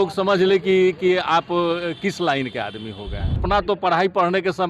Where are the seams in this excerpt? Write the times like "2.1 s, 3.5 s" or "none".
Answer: 3.4 s